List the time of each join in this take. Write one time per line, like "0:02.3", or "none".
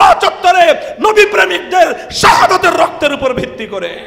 none